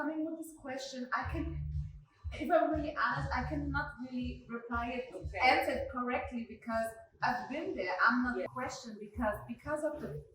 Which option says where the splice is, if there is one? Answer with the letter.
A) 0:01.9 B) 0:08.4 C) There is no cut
B